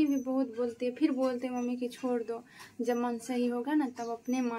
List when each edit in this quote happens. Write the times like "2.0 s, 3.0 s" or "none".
none